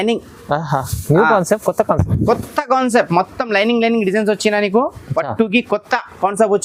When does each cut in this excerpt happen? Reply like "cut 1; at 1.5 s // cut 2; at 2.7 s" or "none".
none